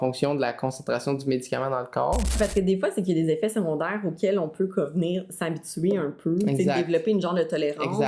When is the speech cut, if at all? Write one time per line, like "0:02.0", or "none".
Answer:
0:02.4